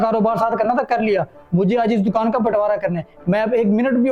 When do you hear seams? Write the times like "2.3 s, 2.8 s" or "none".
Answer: none